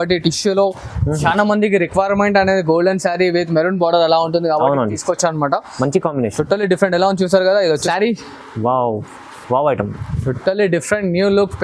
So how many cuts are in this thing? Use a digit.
1